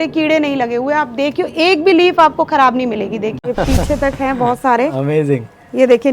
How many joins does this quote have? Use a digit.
1